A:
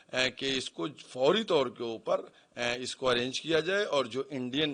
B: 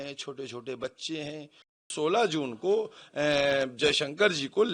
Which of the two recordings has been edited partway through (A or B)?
B